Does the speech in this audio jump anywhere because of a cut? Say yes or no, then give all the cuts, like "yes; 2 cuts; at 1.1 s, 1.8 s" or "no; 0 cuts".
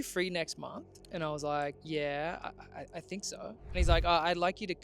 yes; 2 cuts; at 0.9 s, 1.8 s